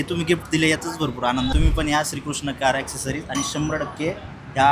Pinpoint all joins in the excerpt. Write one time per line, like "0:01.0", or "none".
0:01.5